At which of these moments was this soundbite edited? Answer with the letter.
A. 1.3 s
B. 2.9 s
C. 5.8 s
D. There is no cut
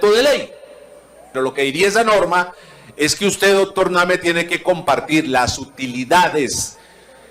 A